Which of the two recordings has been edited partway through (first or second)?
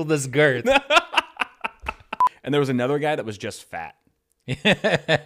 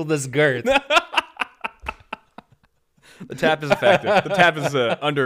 first